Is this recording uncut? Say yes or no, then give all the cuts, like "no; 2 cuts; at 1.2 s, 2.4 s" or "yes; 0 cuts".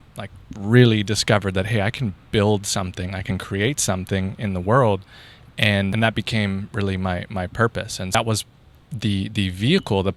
no; 2 cuts; at 5.9 s, 8.1 s